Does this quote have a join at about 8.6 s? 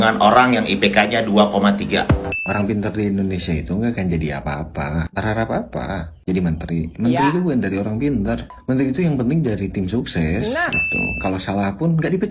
yes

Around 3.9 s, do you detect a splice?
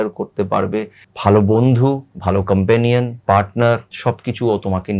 yes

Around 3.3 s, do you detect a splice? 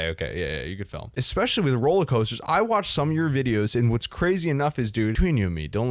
no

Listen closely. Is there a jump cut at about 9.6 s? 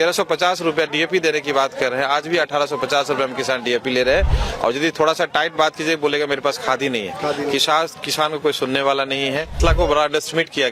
yes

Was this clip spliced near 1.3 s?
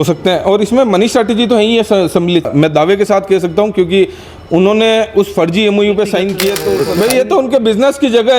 no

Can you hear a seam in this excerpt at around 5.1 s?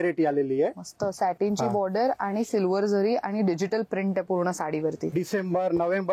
yes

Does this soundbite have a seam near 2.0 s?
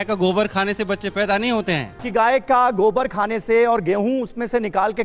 yes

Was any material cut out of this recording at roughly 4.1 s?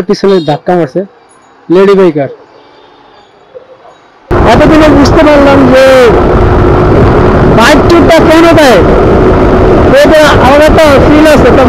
yes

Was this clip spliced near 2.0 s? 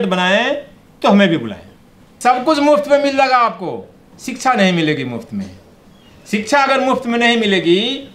yes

